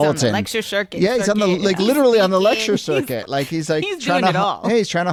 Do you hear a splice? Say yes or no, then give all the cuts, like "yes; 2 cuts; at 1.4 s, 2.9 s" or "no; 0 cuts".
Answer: no; 0 cuts